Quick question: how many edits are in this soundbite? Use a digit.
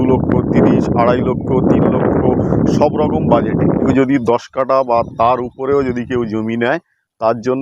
1